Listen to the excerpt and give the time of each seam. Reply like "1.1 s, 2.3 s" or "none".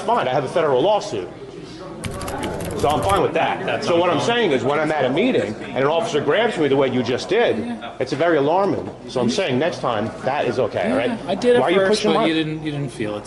none